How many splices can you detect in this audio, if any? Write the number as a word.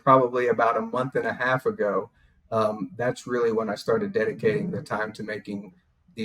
zero